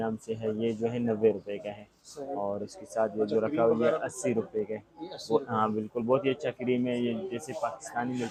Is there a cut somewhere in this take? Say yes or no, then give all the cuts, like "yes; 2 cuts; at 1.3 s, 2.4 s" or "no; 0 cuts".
no; 0 cuts